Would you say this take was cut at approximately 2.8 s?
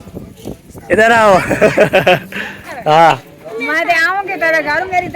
yes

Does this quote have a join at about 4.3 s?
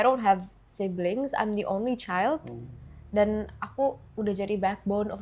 no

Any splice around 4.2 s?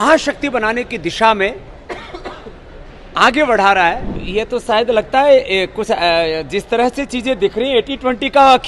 yes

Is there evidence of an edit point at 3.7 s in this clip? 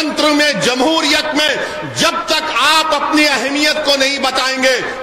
no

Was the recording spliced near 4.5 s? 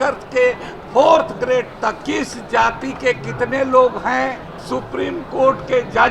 yes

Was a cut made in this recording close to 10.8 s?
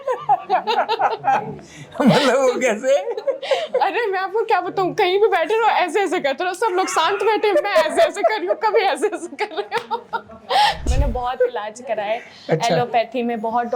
yes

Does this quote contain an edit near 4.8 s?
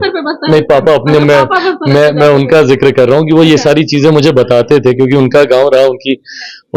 no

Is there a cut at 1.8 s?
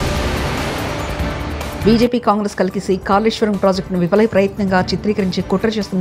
yes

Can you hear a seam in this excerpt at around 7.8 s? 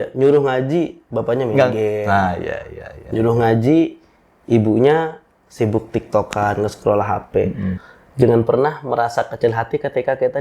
yes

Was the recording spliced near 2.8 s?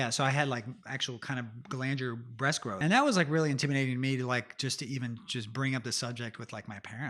yes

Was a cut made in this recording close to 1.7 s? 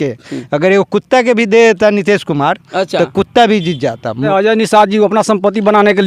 no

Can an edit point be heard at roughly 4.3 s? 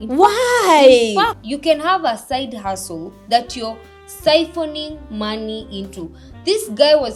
no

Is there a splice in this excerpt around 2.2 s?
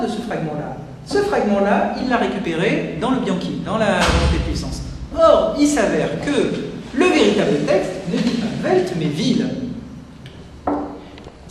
yes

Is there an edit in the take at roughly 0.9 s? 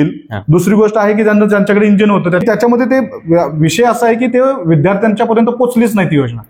no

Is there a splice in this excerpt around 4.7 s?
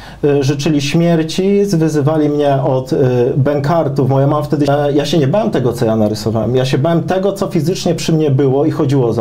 yes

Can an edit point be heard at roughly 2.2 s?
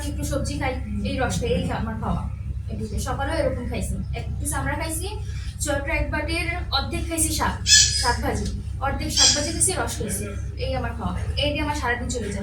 no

